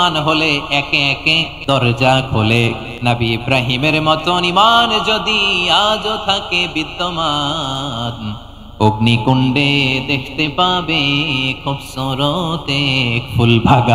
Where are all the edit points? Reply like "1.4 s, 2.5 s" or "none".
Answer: 1.5 s, 2.9 s